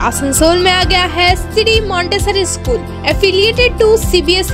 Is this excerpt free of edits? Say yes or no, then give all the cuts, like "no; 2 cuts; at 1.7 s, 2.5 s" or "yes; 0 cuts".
yes; 0 cuts